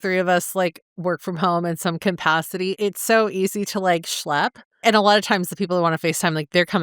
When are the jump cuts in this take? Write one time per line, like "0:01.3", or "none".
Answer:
0:02.8
0:04.8